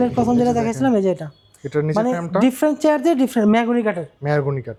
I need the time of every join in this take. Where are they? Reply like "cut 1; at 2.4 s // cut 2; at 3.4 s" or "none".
none

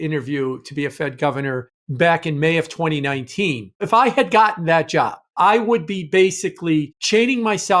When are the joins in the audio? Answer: cut 1; at 3.8 s // cut 2; at 5.2 s // cut 3; at 7.0 s

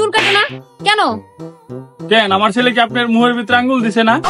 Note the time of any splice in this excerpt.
none

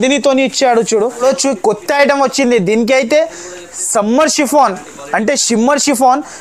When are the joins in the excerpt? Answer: cut 1; at 1.2 s

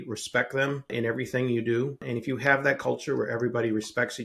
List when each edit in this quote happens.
cut 1; at 0.9 s // cut 2; at 2.0 s

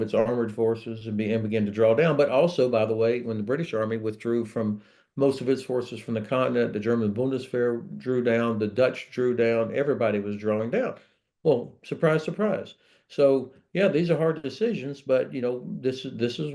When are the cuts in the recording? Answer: none

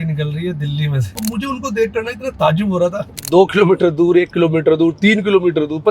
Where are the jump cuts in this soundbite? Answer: cut 1; at 1.1 s // cut 2; at 3.1 s

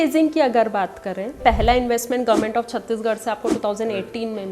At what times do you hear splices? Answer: cut 1; at 1.4 s

